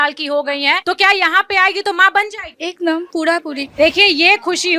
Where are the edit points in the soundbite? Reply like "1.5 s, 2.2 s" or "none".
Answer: 3.6 s